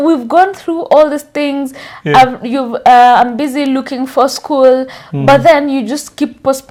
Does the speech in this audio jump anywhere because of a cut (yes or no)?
no